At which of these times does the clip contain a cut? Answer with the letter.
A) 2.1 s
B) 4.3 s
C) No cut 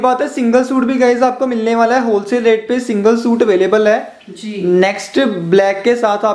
C